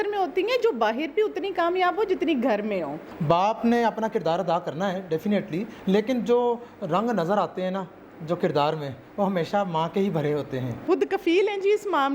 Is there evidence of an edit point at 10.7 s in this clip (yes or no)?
yes